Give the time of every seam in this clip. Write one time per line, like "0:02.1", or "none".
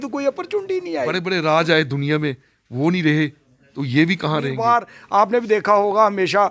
0:01.2
0:04.5